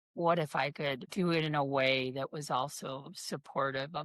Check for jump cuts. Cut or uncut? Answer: cut